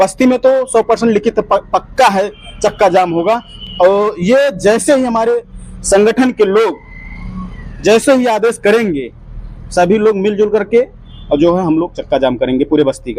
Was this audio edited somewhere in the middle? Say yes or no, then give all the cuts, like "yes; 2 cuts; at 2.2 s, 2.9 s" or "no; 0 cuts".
no; 0 cuts